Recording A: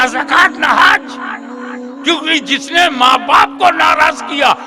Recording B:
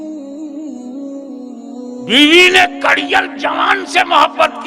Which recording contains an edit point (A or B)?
B